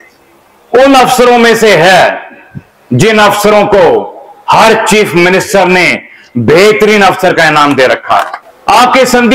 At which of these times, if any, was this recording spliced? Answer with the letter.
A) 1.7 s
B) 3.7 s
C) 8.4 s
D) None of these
C